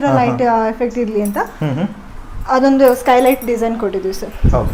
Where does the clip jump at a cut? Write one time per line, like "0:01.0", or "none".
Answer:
none